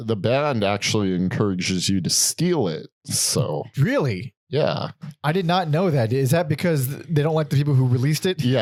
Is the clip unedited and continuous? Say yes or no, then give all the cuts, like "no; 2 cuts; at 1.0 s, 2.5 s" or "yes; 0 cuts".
yes; 0 cuts